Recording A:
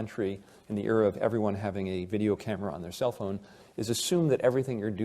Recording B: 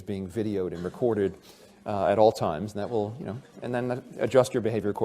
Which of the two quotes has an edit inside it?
B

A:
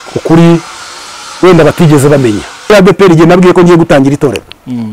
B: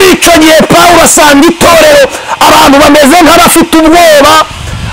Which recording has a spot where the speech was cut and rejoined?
A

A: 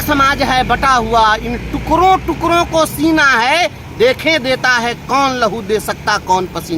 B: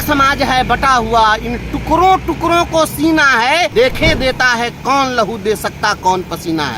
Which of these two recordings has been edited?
B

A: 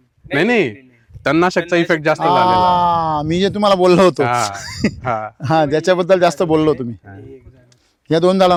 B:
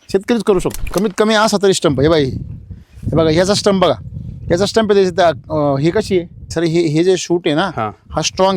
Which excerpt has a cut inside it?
B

